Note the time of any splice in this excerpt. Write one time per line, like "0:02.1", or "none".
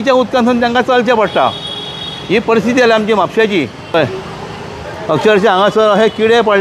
0:03.9